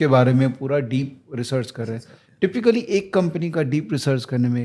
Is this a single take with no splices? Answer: yes; 0 cuts

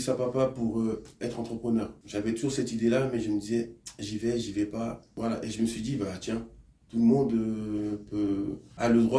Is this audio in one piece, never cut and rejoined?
no; 1 cut; at 5.1 s

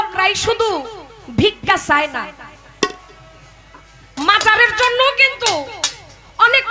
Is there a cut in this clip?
no; 0 cuts

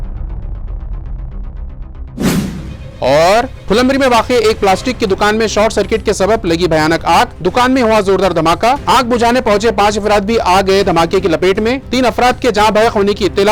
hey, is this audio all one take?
yes; 0 cuts

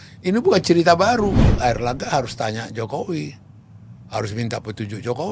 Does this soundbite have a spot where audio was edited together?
yes; 1 cut; at 1.5 s

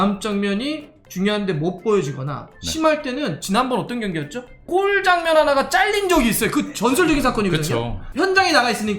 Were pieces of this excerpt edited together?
yes; 1 cut; at 8.0 s

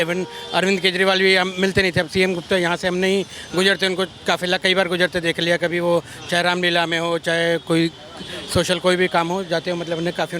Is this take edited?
no; 0 cuts

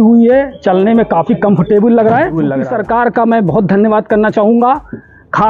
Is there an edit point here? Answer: yes; 1 cut; at 2.4 s

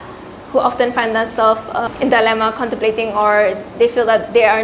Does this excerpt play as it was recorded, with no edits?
no; 1 cut; at 1.9 s

